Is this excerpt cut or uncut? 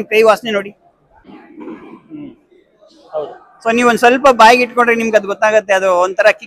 cut